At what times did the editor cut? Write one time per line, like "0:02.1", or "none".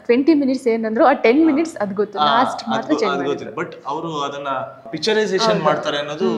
0:04.9